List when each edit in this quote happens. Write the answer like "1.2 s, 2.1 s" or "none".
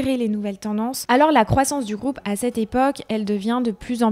1.0 s